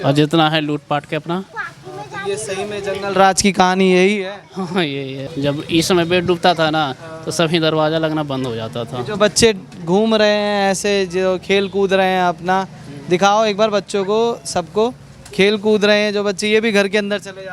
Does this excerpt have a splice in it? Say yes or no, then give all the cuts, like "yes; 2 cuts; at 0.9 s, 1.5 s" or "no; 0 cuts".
yes; 1 cut; at 5.3 s